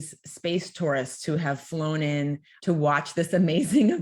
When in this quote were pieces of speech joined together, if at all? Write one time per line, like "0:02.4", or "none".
0:02.5